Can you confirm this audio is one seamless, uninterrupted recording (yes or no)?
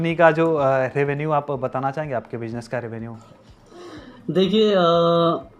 yes